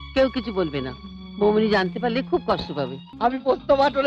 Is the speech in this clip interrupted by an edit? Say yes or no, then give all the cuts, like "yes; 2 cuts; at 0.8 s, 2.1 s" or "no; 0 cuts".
yes; 1 cut; at 3.0 s